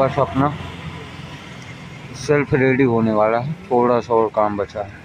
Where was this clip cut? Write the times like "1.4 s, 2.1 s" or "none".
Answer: none